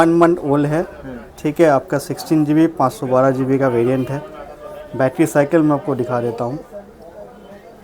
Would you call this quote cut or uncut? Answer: uncut